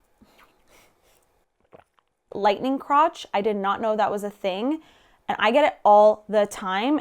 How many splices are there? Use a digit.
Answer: 1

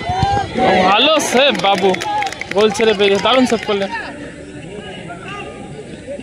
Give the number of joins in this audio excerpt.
1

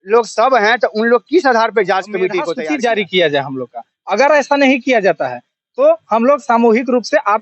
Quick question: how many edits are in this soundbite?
1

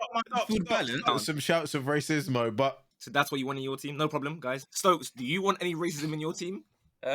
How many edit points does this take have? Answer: 3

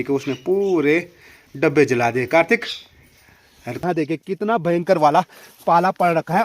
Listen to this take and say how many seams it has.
1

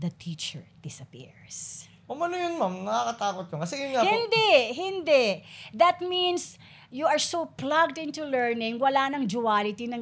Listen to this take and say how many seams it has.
0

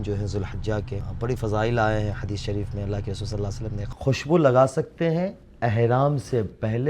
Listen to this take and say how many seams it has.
2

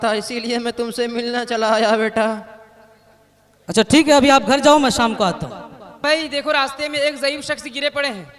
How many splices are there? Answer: 1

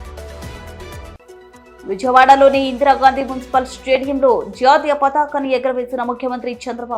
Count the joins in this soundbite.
1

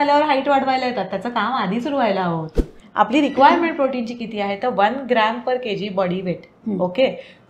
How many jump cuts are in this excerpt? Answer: 1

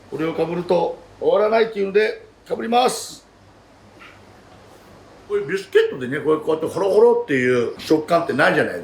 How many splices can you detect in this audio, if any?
2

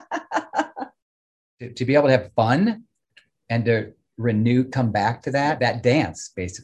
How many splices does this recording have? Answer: 2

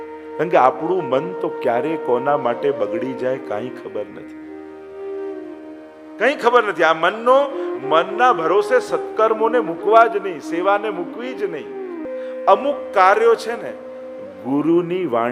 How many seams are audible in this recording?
1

